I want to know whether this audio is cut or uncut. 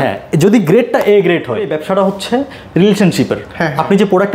cut